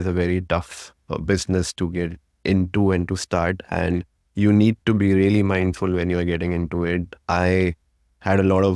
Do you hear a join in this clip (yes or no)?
no